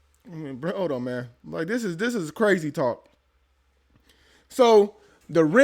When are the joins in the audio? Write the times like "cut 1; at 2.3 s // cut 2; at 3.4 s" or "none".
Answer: none